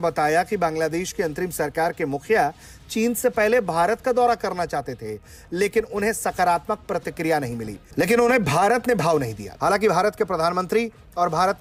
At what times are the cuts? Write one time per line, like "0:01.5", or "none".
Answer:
none